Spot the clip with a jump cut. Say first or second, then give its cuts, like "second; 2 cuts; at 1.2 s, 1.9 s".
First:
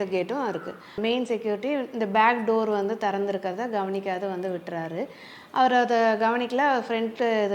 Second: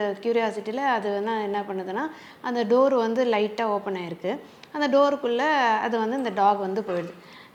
first; 1 cut; at 1.0 s